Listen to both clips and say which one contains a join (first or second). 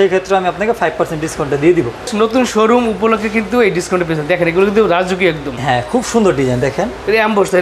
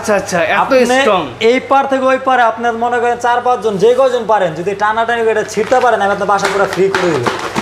first